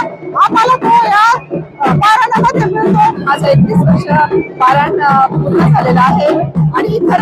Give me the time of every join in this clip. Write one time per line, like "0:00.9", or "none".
0:03.2